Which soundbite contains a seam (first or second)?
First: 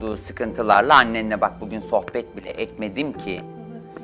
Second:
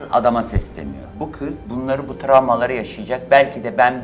second